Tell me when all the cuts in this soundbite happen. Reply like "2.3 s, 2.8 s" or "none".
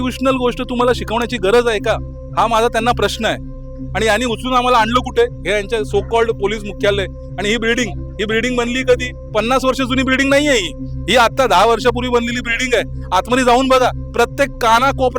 3.7 s